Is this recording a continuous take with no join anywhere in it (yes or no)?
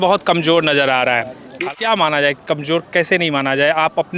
no